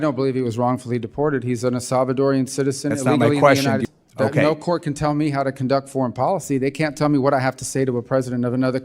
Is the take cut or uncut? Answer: cut